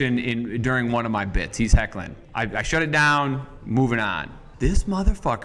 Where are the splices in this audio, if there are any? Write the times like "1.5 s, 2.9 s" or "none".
4.5 s